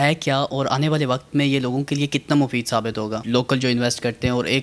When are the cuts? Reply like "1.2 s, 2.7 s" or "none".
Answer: 3.2 s